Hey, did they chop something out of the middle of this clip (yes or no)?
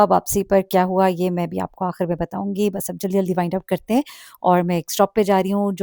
no